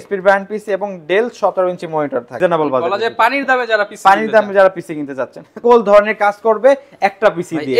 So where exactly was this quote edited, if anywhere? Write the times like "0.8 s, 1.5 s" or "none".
2.4 s, 5.6 s